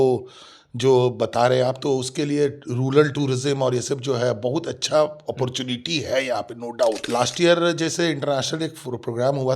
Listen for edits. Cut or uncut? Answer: cut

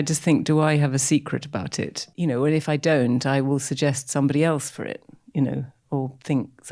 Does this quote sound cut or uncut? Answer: cut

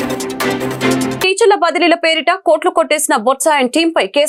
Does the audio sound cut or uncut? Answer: uncut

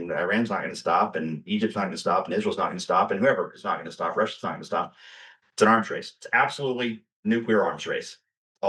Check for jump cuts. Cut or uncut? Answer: uncut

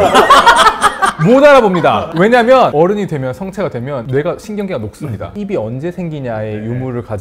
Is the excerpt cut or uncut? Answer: cut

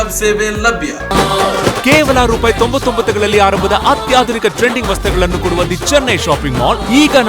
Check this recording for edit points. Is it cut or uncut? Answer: cut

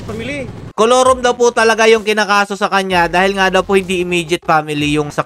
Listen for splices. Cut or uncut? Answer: uncut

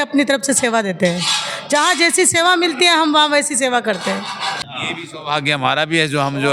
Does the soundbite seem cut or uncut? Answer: cut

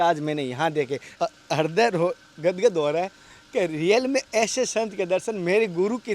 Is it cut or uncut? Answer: cut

